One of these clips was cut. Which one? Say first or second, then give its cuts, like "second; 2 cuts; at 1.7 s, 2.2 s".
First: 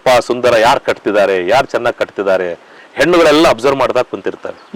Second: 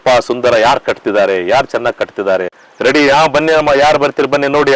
second; 1 cut; at 2.6 s